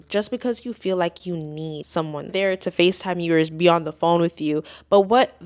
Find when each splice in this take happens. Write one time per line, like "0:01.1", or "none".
0:02.3